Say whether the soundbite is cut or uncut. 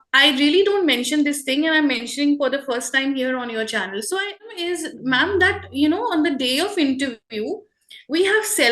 cut